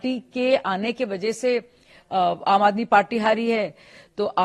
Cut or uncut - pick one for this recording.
uncut